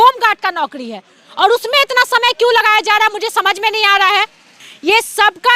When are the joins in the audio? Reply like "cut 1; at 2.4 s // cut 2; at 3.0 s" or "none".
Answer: cut 1; at 4.6 s